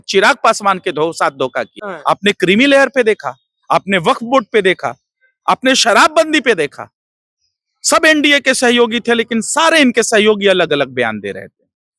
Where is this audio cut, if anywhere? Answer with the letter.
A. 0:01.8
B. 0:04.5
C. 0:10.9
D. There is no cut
A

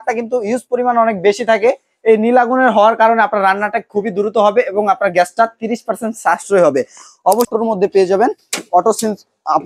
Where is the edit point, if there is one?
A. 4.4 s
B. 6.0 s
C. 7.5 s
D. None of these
C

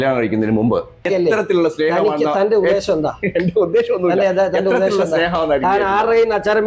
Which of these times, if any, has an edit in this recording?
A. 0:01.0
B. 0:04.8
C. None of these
A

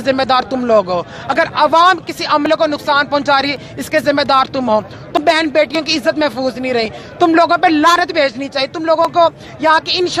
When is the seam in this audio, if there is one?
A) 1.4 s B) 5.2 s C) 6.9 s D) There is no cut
B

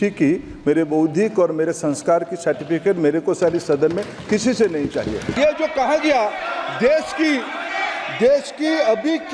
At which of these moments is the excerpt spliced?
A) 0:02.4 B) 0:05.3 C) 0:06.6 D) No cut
B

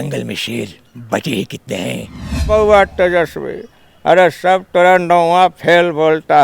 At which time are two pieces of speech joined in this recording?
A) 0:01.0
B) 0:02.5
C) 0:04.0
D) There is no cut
B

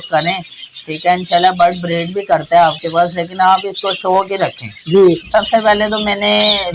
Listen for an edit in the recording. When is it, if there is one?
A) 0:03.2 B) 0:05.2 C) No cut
B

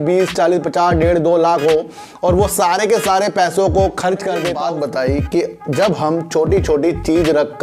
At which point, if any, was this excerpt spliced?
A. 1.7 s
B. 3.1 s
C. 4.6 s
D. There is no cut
C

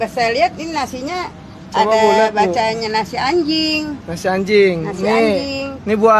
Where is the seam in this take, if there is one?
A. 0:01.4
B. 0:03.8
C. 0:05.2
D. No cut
C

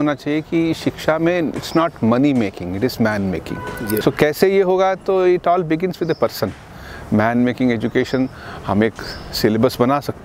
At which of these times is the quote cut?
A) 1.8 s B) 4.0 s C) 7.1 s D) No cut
B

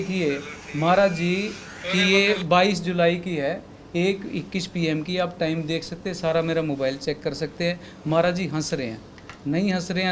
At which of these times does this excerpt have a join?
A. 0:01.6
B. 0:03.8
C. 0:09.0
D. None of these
D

